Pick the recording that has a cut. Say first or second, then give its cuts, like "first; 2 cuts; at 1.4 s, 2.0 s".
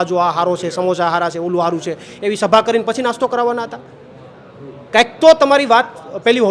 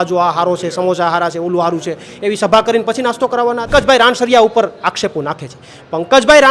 second; 1 cut; at 3.7 s